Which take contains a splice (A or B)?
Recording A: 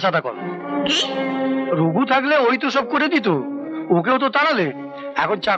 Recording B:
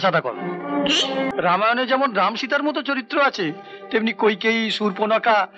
B